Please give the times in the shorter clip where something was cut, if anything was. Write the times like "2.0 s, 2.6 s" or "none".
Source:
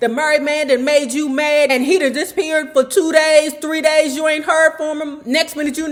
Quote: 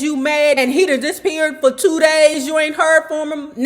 2.4 s